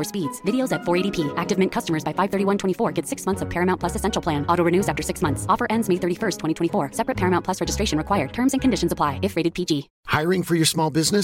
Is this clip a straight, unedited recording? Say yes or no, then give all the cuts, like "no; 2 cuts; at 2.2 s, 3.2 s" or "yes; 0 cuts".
yes; 0 cuts